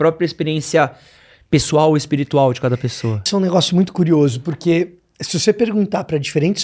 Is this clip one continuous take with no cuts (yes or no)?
no